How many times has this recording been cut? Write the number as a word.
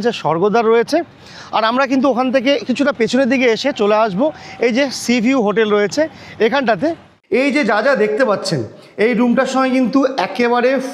one